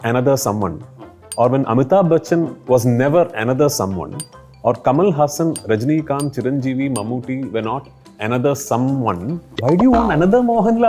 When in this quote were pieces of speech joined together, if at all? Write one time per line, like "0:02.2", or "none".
0:09.4